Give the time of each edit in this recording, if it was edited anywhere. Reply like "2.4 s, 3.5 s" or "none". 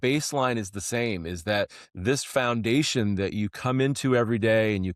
none